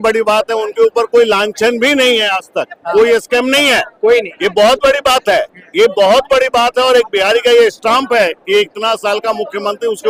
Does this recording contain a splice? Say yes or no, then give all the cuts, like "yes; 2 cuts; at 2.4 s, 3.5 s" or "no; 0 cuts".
no; 0 cuts